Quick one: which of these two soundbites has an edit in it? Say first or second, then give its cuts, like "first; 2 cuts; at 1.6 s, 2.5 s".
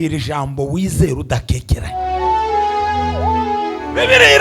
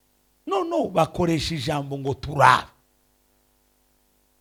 first; 1 cut; at 2.0 s